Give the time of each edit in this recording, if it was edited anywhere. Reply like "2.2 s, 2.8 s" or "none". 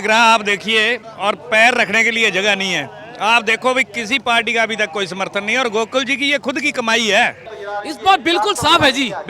7.5 s